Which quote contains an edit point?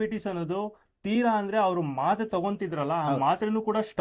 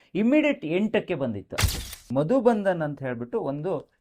second; 1 cut; at 1.7 s

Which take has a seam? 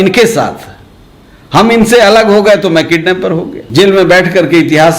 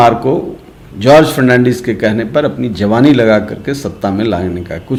first; 1 cut; at 3.6 s

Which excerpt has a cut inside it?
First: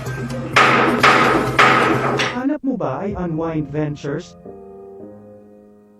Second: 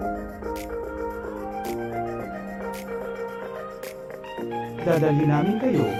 first; 1 cut; at 2.3 s

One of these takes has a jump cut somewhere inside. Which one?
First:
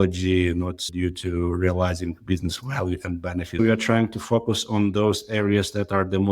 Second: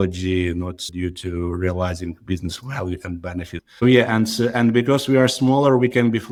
first; 1 cut; at 3.5 s

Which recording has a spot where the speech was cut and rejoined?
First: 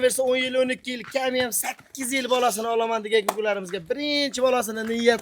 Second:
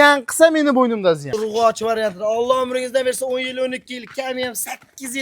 second; 1 cut; at 1.4 s

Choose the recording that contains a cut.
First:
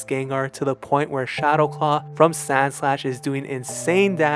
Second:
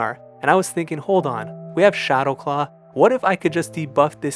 first; 1 cut; at 2.1 s

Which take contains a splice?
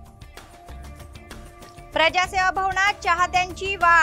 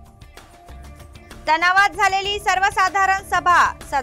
second; 1 cut; at 1.1 s

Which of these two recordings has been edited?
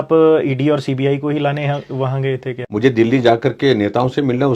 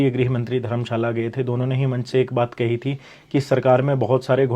first; 1 cut; at 2.5 s

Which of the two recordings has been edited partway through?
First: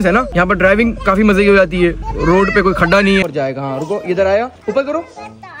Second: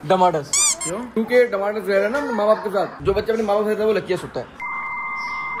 first; 1 cut; at 3.2 s

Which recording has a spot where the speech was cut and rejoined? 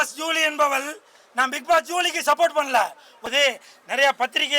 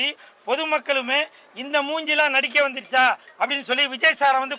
first; 1 cut; at 3.1 s

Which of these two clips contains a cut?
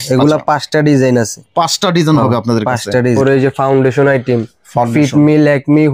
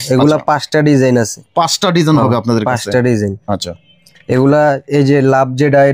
first; 1 cut; at 3.2 s

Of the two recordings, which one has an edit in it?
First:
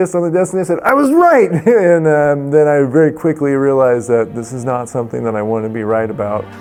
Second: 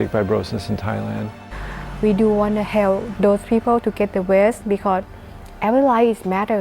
second; 1 cut; at 3.1 s

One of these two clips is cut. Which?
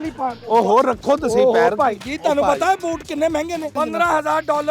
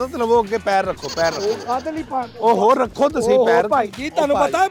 first; 1 cut; at 3.7 s

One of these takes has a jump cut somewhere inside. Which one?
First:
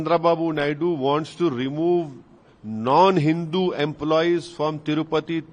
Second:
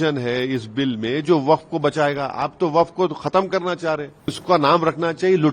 second; 1 cut; at 4.4 s

